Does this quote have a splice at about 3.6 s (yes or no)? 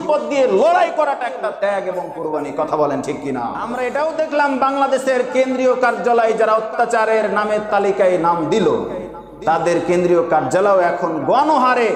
yes